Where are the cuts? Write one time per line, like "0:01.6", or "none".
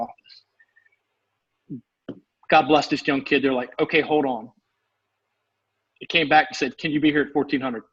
none